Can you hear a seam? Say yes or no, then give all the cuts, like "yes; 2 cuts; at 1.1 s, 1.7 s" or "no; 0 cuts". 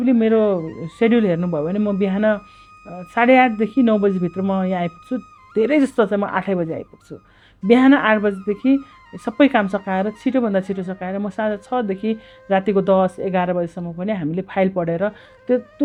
no; 0 cuts